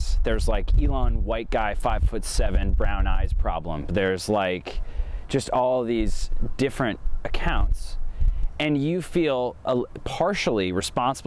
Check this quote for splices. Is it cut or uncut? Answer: uncut